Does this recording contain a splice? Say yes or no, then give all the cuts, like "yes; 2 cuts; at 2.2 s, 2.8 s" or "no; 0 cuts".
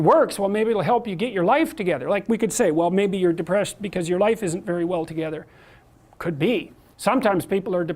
yes; 1 cut; at 6.8 s